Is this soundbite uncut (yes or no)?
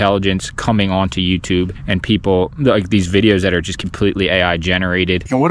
yes